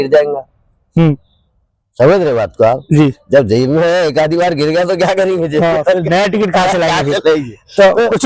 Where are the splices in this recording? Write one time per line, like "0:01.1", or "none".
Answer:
none